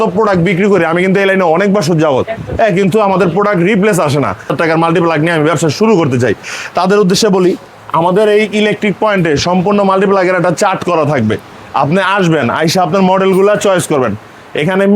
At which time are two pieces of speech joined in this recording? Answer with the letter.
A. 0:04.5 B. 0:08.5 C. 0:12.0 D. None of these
A